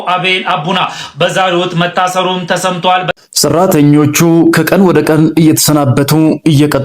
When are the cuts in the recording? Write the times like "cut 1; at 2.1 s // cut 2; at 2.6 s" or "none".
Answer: cut 1; at 3.1 s